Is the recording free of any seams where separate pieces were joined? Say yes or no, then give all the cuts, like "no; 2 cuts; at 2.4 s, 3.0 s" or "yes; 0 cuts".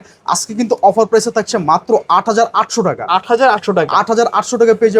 yes; 0 cuts